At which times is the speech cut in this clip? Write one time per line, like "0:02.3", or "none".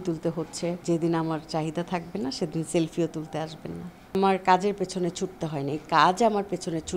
0:00.8
0:04.1